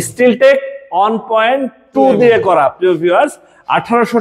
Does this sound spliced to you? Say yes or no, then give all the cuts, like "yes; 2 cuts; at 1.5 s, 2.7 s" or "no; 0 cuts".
no; 0 cuts